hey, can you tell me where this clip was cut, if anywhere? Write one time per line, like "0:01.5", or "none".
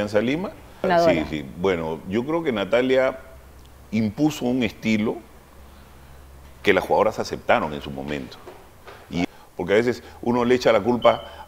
0:00.8
0:09.2